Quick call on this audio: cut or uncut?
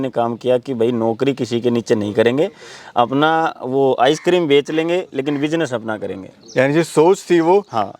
uncut